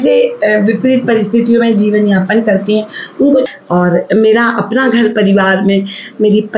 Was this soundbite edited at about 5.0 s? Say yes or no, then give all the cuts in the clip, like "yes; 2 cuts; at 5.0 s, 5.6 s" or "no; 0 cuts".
no; 1 cut; at 3.5 s